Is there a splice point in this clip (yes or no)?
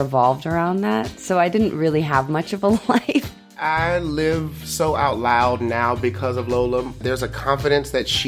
yes